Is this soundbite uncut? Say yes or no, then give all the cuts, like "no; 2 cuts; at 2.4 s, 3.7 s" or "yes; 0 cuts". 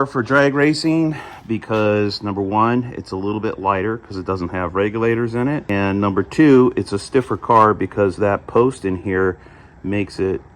yes; 0 cuts